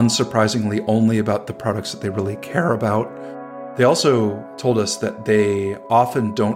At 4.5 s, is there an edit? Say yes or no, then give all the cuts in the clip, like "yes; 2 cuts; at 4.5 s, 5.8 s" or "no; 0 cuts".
yes; 2 cuts; at 3.2 s, 4.5 s